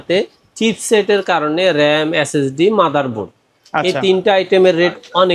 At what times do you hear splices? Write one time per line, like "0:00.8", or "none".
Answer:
none